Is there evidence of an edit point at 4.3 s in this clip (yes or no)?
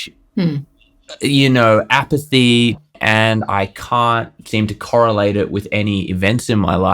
no